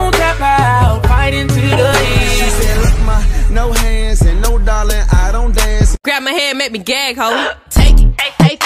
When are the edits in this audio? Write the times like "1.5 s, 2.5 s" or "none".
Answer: 6.0 s